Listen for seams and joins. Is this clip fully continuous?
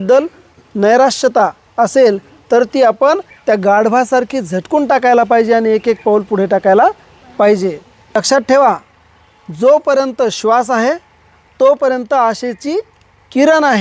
no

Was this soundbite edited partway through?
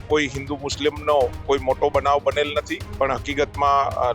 yes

